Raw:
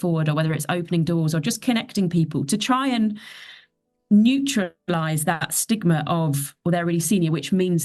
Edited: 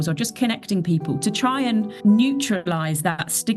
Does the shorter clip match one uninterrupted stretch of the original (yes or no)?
no